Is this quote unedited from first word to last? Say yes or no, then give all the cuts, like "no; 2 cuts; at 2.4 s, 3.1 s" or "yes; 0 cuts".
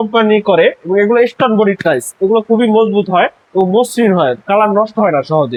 yes; 0 cuts